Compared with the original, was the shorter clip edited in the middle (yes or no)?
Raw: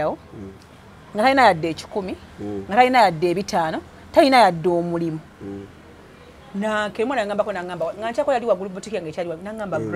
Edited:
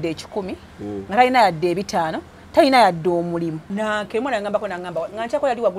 yes